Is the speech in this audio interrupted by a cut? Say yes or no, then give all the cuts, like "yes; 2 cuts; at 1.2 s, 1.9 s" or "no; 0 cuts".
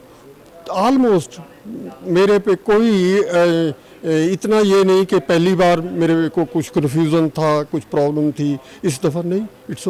no; 0 cuts